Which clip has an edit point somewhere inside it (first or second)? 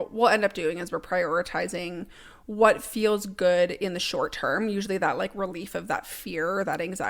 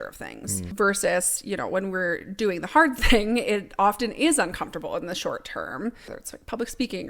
second